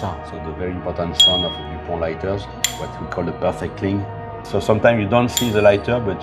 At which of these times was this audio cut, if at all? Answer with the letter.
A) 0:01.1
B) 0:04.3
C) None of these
B